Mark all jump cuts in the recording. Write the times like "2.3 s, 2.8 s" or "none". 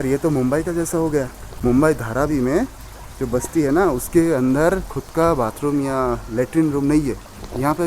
1.4 s